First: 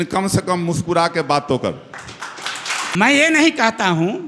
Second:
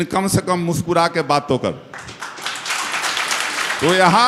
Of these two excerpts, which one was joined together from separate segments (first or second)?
first